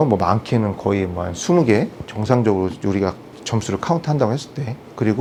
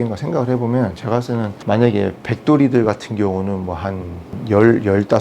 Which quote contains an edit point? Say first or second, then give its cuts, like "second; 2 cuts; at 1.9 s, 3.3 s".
second; 2 cuts; at 1.6 s, 4.3 s